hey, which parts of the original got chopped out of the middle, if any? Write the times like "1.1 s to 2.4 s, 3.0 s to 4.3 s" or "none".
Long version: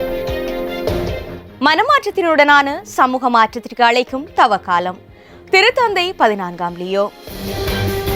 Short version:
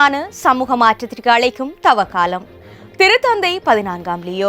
none

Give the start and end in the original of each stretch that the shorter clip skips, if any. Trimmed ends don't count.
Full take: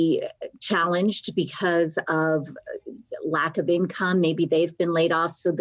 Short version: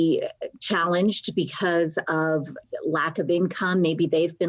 2.6 s to 3.0 s

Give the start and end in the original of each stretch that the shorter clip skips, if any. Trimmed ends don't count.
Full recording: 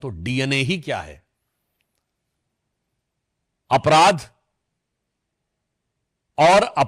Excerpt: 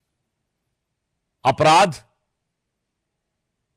none

